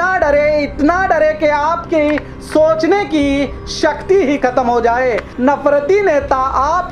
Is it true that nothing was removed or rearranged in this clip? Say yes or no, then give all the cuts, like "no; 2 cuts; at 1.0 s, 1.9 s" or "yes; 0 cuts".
no; 1 cut; at 5.3 s